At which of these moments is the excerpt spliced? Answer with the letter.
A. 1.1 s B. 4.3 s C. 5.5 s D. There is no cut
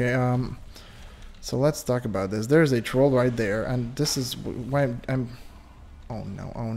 D